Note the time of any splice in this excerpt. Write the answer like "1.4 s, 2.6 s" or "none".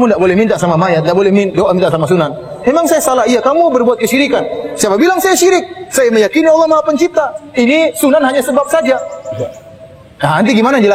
none